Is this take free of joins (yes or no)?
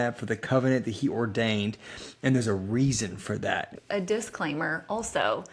no